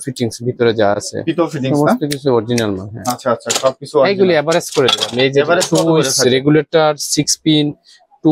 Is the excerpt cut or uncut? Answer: uncut